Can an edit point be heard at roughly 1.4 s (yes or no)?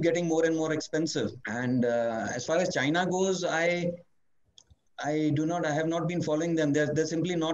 yes